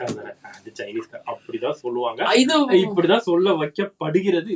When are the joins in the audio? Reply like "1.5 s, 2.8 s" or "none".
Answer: none